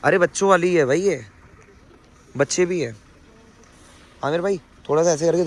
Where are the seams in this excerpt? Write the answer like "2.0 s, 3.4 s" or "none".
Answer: none